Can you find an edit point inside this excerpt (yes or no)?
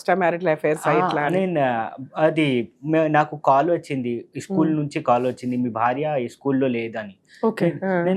no